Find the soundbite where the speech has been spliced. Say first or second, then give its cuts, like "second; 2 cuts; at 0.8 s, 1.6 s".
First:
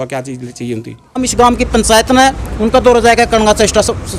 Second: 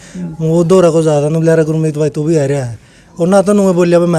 first; 1 cut; at 1.3 s